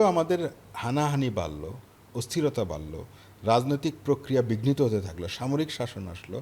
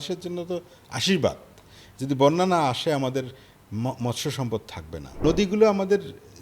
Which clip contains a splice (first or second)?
second